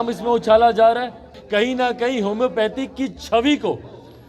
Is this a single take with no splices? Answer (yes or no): no